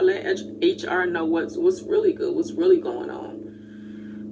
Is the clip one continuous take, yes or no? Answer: yes